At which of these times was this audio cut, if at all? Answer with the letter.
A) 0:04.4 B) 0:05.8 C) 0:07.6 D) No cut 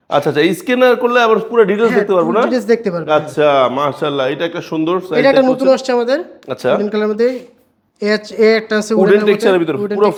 D